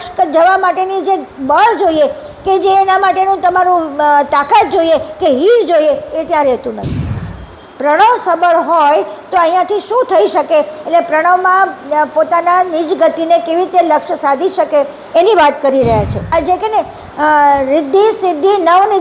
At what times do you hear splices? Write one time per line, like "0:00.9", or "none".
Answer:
0:07.3
0:16.3